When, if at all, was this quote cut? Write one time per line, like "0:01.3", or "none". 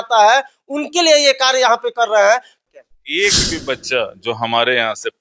0:02.6